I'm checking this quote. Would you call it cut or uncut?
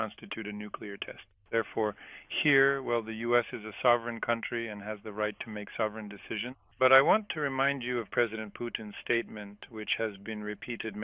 cut